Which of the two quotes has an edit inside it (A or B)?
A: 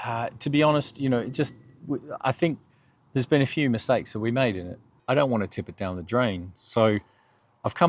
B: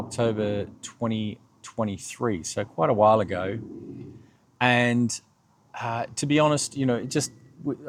A